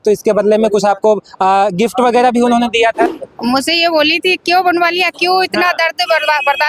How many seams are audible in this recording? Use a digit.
1